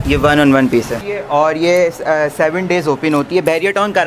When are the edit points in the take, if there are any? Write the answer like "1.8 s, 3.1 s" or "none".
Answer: 0.9 s